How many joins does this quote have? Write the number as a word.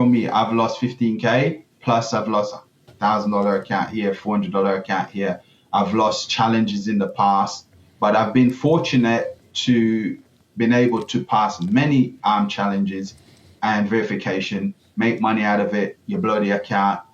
zero